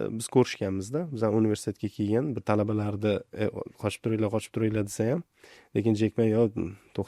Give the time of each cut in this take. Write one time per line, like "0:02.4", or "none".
0:02.4